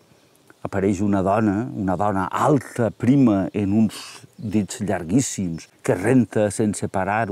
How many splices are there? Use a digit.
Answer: 1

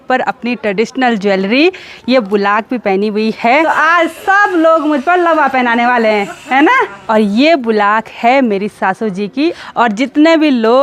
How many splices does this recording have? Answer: 3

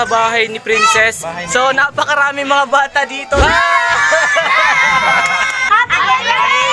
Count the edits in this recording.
2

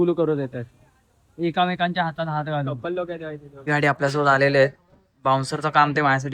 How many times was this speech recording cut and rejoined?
1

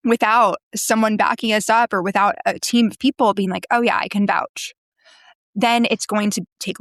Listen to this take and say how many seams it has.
0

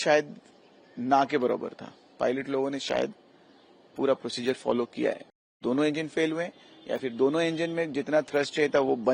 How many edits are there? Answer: 1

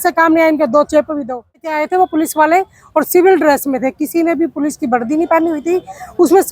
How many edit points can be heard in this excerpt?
1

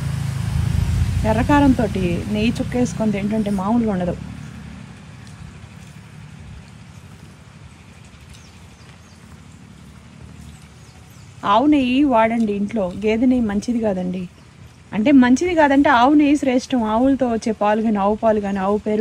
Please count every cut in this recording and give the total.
0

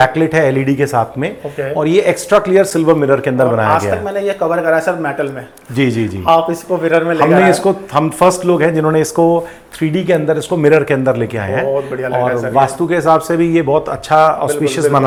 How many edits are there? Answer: 0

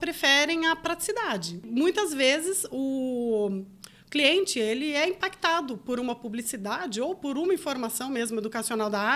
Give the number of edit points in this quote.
1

